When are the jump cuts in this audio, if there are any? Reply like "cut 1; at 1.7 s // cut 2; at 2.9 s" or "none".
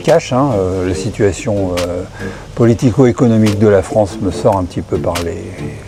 none